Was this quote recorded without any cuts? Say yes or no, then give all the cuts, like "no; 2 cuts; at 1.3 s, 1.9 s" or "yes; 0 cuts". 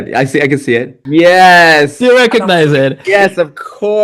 no; 1 cut; at 1.0 s